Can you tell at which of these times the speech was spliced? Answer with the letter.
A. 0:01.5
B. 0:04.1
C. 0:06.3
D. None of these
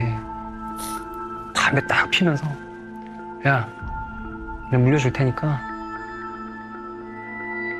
A